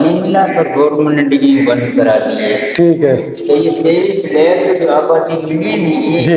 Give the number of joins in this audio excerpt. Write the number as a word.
zero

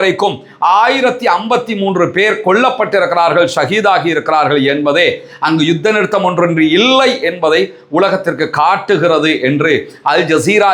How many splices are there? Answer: zero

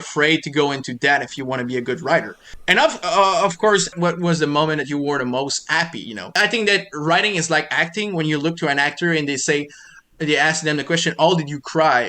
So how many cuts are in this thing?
three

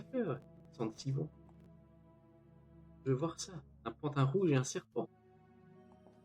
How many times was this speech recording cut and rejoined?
one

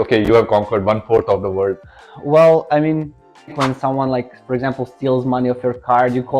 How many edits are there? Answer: one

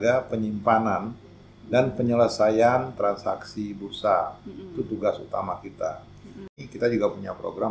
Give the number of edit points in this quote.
one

